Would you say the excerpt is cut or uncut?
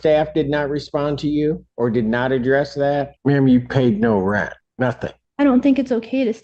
cut